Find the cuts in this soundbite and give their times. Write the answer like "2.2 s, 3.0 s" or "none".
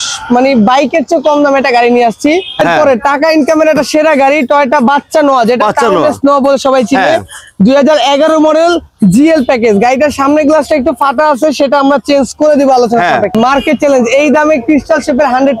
2.6 s, 13.3 s